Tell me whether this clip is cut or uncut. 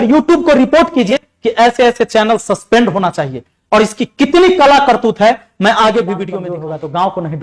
cut